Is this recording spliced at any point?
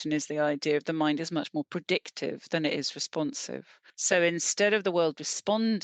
yes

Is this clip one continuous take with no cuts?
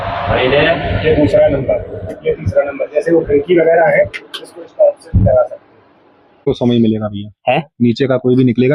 no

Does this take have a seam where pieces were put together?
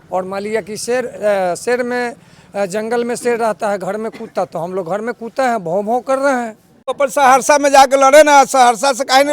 yes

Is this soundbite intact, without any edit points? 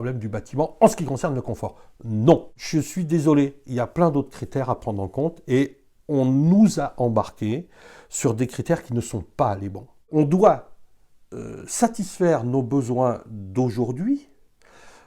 no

